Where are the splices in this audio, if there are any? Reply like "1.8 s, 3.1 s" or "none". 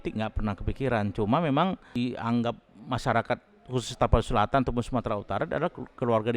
1.9 s